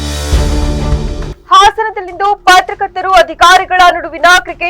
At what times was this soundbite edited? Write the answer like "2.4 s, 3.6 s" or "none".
1.3 s